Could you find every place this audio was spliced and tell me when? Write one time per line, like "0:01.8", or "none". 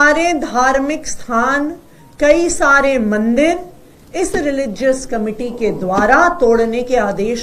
none